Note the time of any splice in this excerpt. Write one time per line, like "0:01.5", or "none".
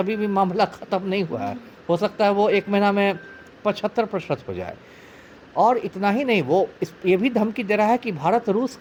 none